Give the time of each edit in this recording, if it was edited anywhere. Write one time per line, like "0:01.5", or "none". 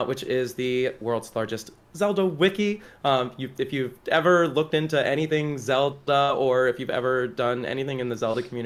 none